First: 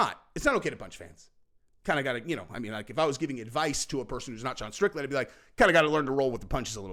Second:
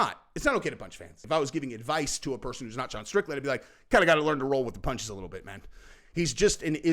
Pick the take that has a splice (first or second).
second